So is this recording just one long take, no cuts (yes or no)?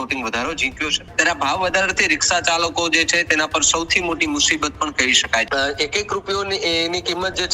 no